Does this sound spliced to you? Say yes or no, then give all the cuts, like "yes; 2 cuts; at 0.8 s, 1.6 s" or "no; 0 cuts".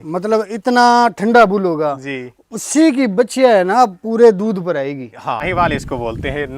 yes; 1 cut; at 5.5 s